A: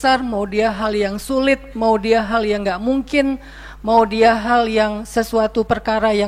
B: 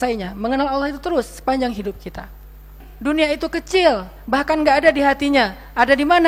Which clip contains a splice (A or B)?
B